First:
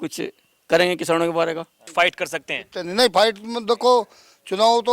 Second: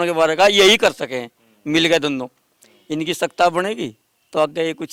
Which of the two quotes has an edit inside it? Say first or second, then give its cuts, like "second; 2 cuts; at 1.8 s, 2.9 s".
first; 1 cut; at 1.8 s